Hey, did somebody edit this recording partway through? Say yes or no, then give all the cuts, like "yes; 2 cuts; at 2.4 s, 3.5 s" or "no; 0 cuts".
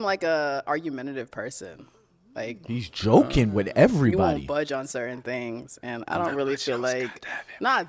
no; 0 cuts